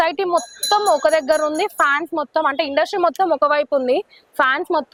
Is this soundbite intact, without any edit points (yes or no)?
yes